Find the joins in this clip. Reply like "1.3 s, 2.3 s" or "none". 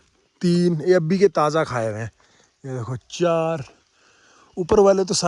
none